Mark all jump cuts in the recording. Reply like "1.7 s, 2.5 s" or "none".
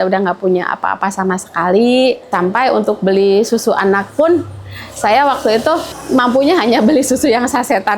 2.3 s, 5.9 s